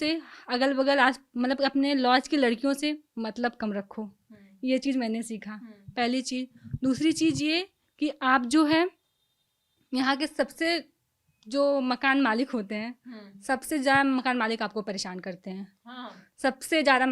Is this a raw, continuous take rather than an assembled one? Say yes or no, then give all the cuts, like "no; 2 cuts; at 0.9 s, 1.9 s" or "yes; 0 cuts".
yes; 0 cuts